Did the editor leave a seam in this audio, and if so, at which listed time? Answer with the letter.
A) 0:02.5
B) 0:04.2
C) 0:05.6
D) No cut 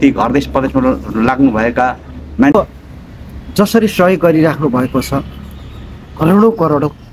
A